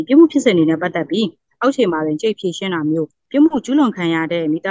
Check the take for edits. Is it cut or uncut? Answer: cut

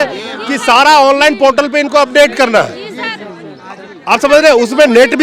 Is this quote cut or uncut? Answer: uncut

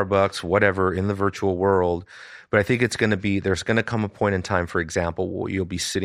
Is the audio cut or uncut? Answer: uncut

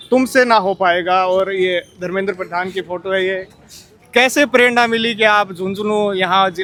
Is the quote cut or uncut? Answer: uncut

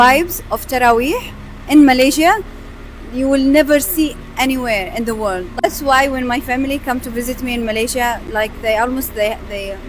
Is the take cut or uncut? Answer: cut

